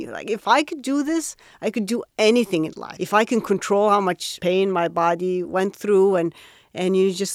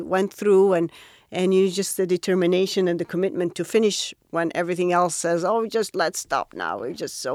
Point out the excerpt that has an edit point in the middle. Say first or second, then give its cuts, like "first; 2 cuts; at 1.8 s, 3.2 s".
first; 2 cuts; at 2.9 s, 4.3 s